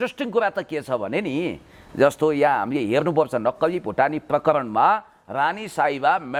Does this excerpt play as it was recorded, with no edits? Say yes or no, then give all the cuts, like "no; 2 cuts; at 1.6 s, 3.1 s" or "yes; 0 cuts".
yes; 0 cuts